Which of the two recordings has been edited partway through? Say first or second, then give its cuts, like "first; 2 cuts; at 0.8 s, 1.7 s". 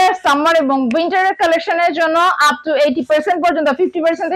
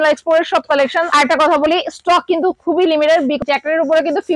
second; 2 cuts; at 1.1 s, 3.4 s